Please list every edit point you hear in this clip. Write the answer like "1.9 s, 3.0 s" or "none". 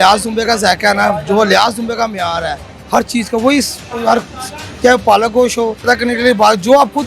5.9 s